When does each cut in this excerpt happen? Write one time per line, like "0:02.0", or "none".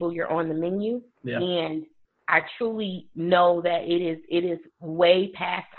0:01.1

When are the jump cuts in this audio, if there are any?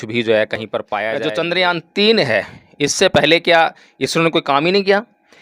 0:01.1

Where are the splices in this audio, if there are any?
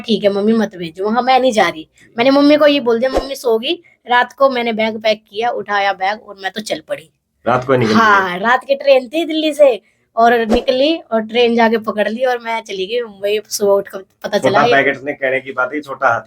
none

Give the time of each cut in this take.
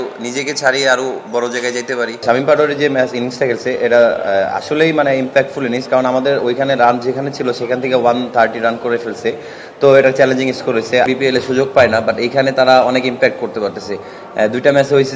0:02.2
0:11.1

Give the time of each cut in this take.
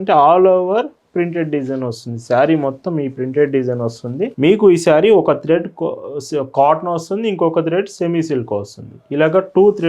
0:04.3

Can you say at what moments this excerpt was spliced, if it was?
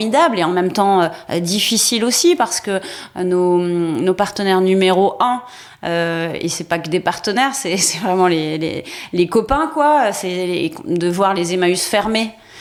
none

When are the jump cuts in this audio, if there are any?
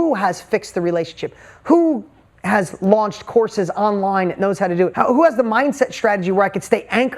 0:04.9

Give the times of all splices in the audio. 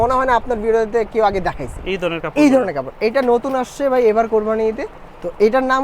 none

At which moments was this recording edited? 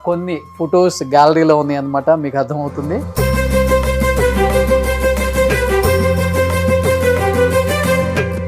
none

